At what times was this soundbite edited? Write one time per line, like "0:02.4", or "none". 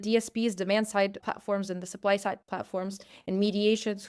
0:01.2